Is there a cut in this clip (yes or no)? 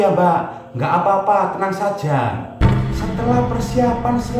yes